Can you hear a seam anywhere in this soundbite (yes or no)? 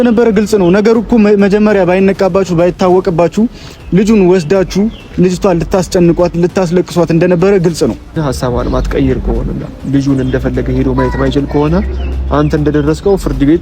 yes